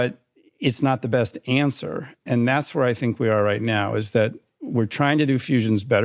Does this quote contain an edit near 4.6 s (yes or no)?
no